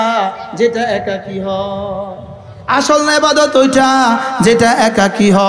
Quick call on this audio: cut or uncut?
uncut